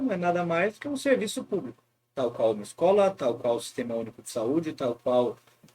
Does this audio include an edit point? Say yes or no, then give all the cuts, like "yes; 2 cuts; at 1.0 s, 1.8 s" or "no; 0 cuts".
no; 0 cuts